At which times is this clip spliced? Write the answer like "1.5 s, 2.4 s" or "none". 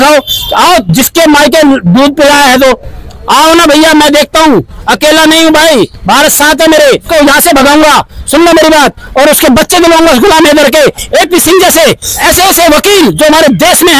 7.1 s, 11.0 s